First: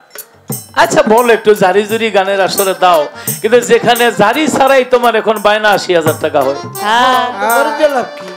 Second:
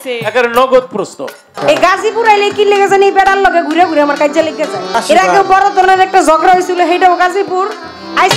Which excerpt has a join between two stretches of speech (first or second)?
second